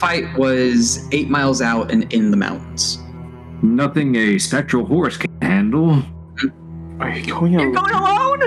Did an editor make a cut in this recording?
no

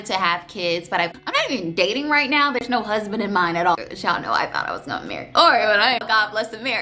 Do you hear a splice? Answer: yes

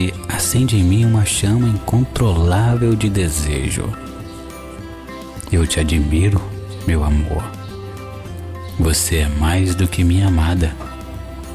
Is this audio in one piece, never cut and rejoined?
no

